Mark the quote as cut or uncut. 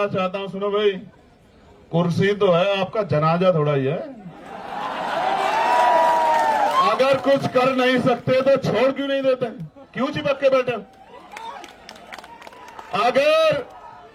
uncut